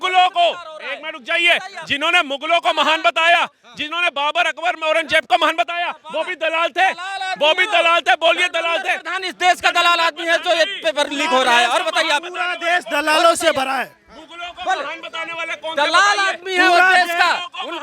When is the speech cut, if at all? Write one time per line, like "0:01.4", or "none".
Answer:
none

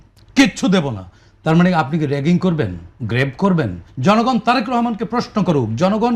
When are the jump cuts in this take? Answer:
0:03.8

